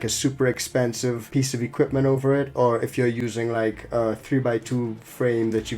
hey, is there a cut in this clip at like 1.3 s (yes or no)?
yes